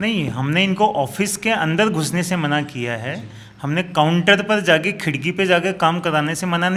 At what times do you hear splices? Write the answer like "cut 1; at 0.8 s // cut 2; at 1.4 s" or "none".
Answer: none